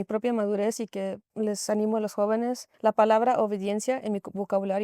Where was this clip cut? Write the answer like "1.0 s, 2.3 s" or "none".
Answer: 1.2 s, 2.7 s